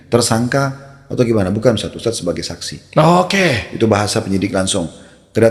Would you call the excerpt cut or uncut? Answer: uncut